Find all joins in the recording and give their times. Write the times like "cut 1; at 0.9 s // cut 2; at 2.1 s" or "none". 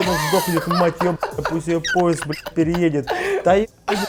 none